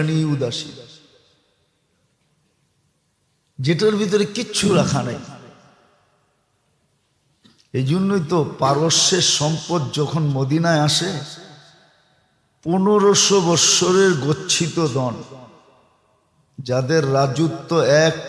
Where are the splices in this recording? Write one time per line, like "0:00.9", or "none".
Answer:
none